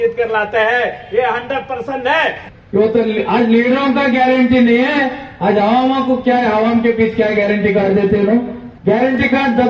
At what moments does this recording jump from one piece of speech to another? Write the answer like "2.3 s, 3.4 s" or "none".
2.4 s, 8.6 s